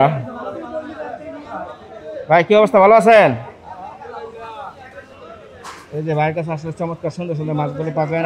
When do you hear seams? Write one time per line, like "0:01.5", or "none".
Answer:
none